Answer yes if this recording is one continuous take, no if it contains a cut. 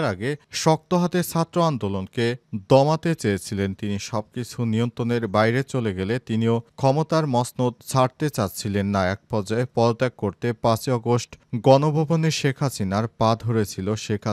yes